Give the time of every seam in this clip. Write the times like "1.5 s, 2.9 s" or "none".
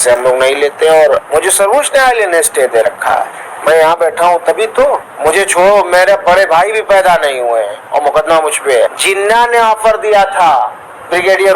1.2 s, 5.1 s, 8.9 s